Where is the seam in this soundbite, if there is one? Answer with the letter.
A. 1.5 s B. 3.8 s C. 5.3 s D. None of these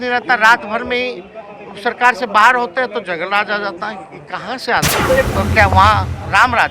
C